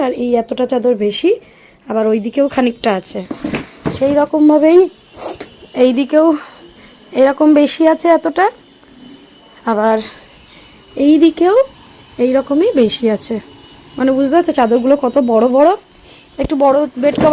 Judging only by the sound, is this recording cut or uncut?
uncut